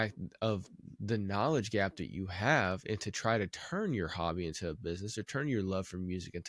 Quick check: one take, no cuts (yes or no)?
yes